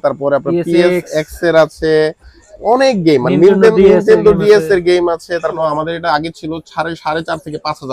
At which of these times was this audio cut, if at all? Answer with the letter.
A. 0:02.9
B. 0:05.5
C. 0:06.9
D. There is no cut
B